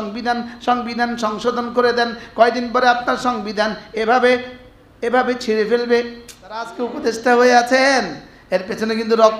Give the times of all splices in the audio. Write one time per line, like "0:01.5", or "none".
0:06.7